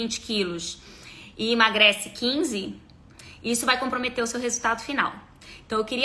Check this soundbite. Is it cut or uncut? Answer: uncut